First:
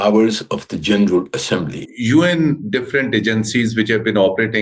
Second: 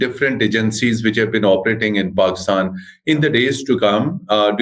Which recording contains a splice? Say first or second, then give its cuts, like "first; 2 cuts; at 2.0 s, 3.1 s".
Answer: first; 1 cut; at 1.8 s